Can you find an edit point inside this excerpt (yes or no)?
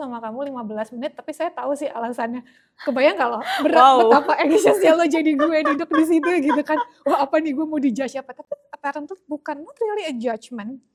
no